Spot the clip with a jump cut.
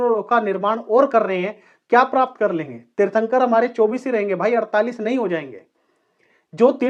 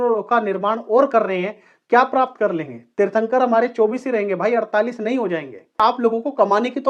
second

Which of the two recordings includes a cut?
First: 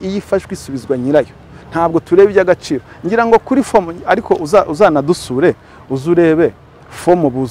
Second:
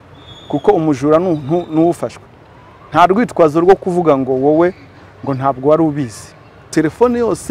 second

